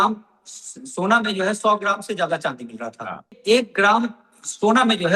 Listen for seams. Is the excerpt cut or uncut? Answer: cut